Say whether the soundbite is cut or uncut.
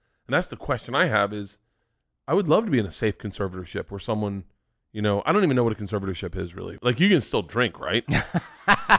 cut